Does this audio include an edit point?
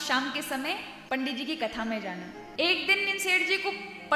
yes; 2 cuts; at 0.9 s, 2.4 s

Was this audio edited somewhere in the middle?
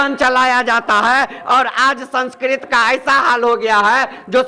no; 0 cuts

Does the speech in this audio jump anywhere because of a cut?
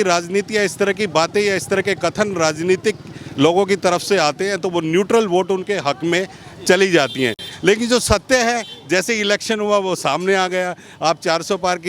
no; 0 cuts

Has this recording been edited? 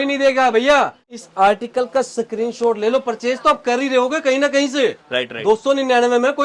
yes; 1 cut; at 1.0 s

